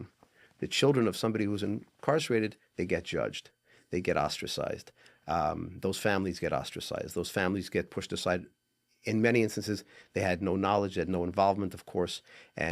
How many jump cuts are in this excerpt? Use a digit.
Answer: 0